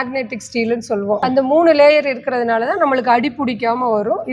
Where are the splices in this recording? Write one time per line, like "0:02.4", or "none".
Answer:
0:01.2